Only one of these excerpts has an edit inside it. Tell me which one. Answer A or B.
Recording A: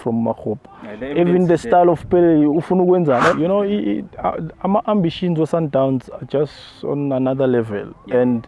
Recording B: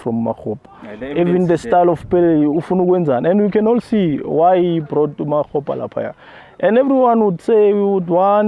A